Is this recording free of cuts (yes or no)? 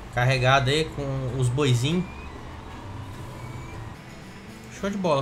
no